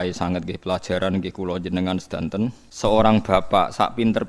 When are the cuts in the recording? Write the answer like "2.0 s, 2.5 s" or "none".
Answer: 2.6 s